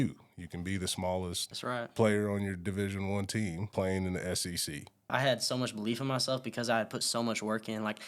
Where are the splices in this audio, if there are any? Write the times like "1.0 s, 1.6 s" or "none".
1.5 s, 3.6 s, 5.1 s